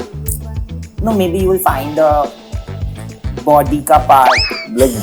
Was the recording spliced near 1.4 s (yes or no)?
no